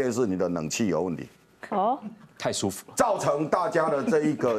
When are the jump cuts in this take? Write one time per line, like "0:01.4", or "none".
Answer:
none